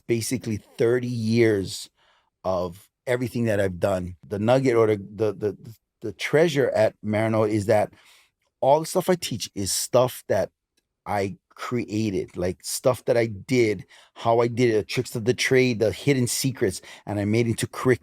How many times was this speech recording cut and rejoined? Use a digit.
1